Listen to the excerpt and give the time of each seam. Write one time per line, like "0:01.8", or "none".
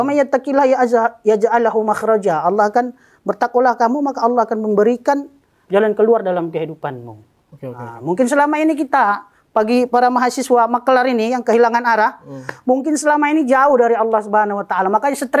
none

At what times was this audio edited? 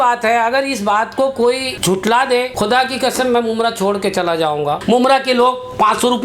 0:01.7
0:02.5
0:04.8

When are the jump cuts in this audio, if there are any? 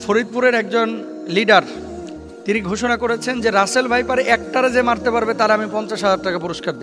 none

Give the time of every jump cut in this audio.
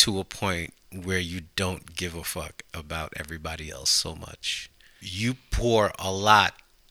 0:05.0

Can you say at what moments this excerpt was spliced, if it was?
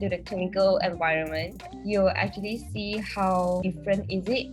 0:03.6

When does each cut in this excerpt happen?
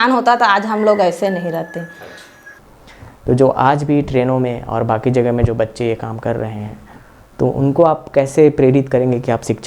0:02.6

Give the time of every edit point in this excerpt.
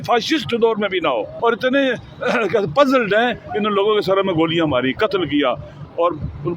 0:01.3

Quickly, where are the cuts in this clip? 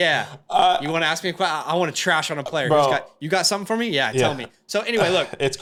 none

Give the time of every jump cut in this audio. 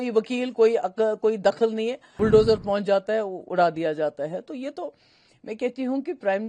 0:02.0

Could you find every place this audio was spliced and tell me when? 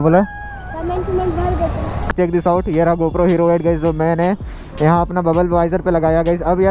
0:02.1

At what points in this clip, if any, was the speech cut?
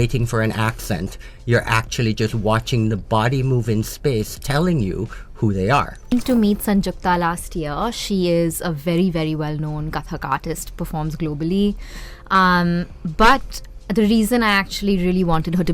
0:06.1

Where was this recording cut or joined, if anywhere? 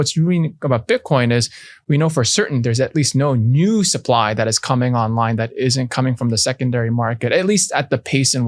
none

